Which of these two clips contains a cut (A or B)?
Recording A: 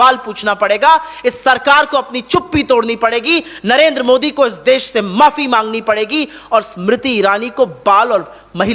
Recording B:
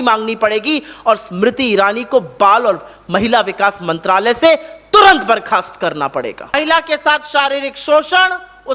B